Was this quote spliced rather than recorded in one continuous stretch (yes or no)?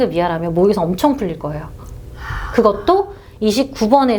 no